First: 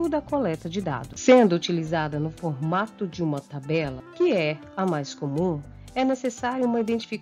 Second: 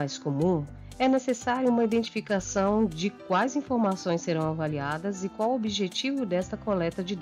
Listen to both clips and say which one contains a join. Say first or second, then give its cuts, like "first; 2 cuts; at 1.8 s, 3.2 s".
first; 1 cut; at 4.0 s